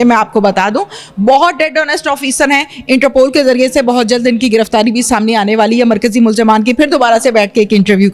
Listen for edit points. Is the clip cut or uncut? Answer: uncut